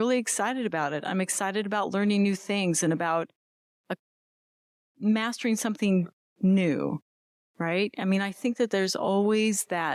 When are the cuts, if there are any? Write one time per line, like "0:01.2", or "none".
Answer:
none